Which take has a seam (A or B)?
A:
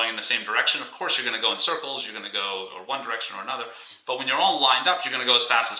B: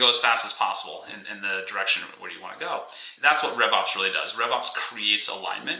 B